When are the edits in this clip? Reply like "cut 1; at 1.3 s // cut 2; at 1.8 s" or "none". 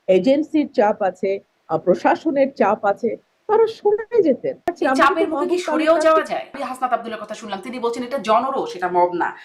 cut 1; at 4.7 s // cut 2; at 6.6 s